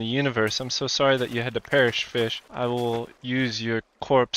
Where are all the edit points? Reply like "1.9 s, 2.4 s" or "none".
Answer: 2.4 s, 3.2 s